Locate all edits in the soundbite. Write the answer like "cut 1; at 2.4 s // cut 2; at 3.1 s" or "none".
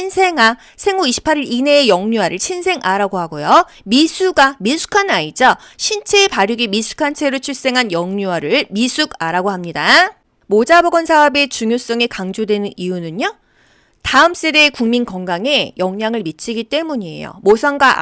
cut 1; at 10.3 s